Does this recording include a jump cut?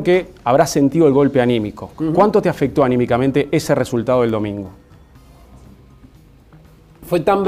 yes; 1 cut; at 3.3 s

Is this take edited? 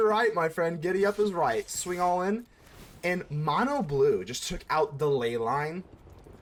no; 0 cuts

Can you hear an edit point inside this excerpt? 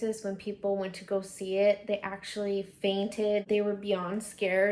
no; 0 cuts

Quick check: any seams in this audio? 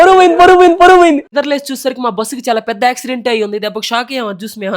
yes; 1 cut; at 1.3 s

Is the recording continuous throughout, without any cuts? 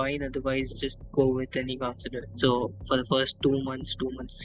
no; 1 cut; at 2.3 s

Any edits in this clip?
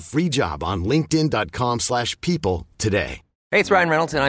no; 0 cuts

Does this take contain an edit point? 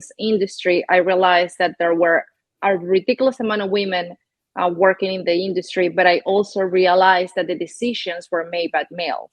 no; 0 cuts

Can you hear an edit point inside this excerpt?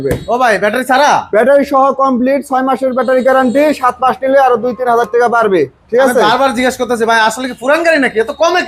no; 0 cuts

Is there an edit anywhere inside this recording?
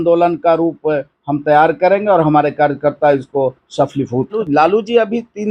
yes; 1 cut; at 4.4 s

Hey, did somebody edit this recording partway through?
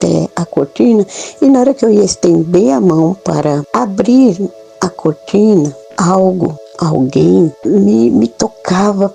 yes; 4 cuts; at 3.7 s, 5.8 s, 6.7 s, 7.6 s

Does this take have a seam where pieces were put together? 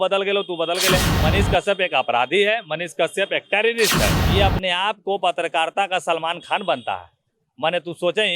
yes; 2 cuts; at 1.2 s, 4.2 s

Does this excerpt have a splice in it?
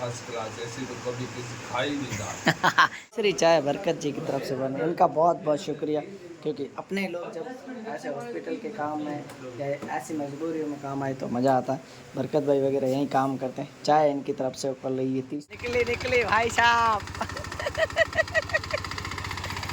yes; 2 cuts; at 3.0 s, 15.5 s

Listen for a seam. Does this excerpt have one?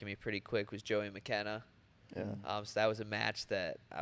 no; 0 cuts

